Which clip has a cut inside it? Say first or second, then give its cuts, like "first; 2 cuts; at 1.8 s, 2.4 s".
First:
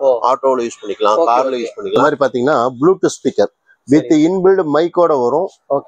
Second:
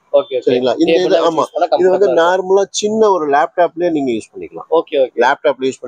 first; 1 cut; at 2.0 s